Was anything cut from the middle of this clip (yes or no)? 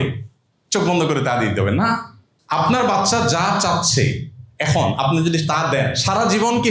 no